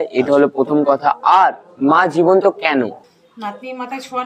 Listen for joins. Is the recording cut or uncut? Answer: cut